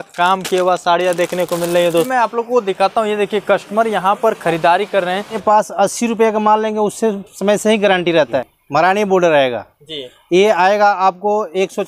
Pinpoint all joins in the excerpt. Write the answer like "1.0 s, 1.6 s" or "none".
2.1 s, 5.4 s, 8.5 s